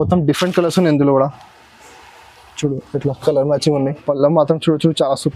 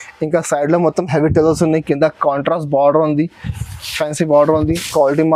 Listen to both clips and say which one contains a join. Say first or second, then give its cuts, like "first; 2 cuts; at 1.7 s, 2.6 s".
first; 1 cut; at 4.0 s